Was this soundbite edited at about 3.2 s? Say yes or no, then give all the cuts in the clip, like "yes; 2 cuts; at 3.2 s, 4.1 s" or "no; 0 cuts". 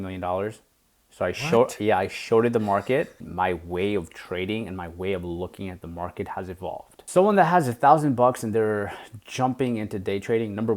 yes; 2 cuts; at 3.2 s, 6.9 s